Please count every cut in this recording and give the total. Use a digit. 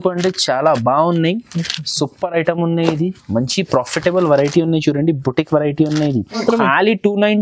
1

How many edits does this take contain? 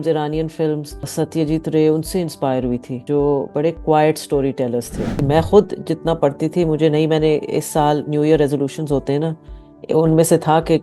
3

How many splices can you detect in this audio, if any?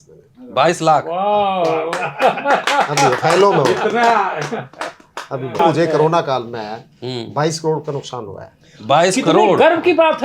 1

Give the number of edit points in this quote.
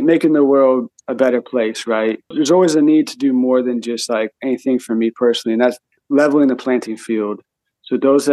3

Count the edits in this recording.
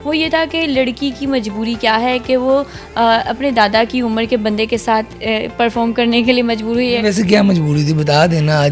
0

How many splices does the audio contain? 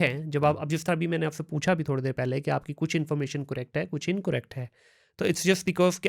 0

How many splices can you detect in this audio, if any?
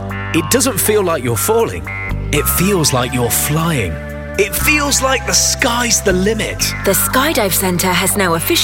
0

